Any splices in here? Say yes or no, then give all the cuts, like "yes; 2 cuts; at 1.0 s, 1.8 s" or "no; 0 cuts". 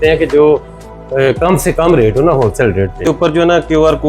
yes; 1 cut; at 3.1 s